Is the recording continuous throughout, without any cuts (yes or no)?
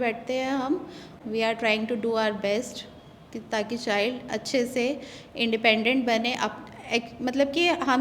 no